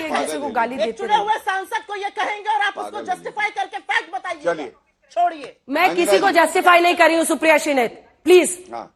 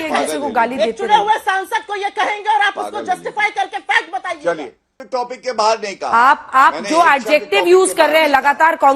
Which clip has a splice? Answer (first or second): second